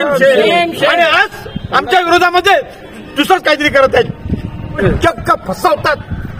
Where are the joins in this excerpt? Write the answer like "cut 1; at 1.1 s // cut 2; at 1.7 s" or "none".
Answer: cut 1; at 4.8 s